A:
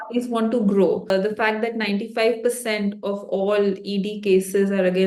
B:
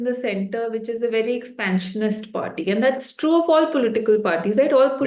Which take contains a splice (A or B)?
A